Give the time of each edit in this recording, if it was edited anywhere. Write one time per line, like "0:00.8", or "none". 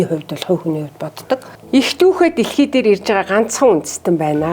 0:01.5